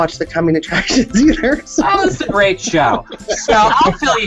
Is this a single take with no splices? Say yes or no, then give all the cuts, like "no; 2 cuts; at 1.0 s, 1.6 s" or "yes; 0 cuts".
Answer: yes; 0 cuts